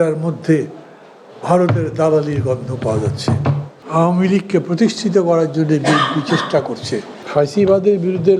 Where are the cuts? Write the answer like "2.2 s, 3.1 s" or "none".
3.8 s, 7.2 s